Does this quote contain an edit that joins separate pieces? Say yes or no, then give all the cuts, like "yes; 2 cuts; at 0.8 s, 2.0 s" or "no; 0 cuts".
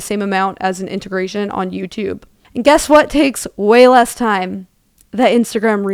no; 0 cuts